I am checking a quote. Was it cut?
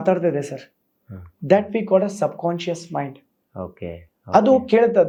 no; 0 cuts

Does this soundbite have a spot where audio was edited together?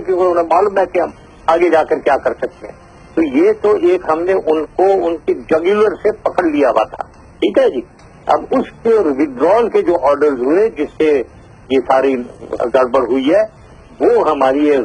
no; 0 cuts

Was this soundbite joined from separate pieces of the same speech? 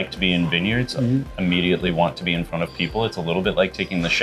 no; 0 cuts

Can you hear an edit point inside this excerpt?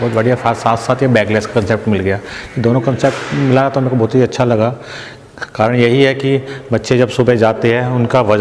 no; 0 cuts

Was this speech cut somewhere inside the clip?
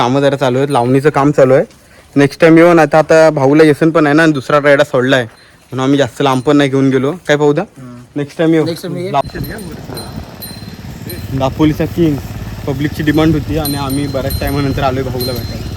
yes; 1 cut; at 9.2 s

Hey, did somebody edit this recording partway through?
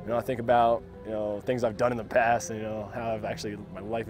yes; 1 cut; at 1.0 s

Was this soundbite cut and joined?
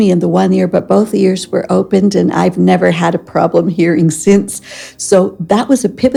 no; 0 cuts

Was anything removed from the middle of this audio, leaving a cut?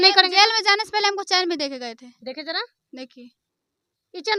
no; 0 cuts

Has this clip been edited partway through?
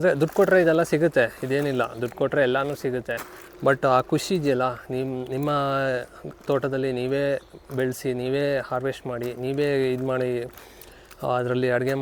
no; 0 cuts

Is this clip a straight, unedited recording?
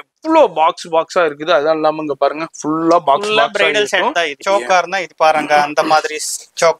no; 1 cut; at 4.4 s

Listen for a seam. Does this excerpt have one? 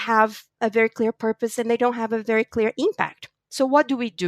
no; 0 cuts

